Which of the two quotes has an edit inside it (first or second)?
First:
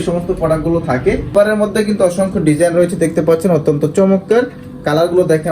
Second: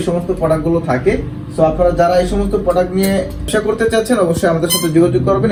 first